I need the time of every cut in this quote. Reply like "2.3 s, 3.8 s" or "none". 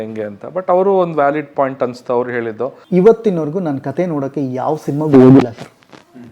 2.7 s